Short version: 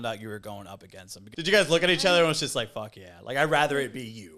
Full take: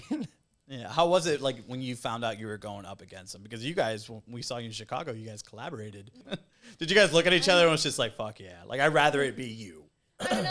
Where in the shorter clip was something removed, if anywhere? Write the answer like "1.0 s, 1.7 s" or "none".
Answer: 1.1 s